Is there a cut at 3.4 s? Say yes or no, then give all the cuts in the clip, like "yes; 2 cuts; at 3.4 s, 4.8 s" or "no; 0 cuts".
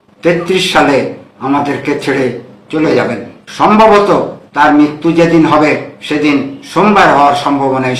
yes; 1 cut; at 3.4 s